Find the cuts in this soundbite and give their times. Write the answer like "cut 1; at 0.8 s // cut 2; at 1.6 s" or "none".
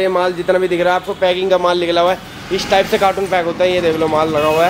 none